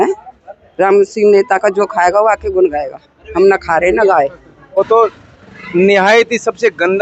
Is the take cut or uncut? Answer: cut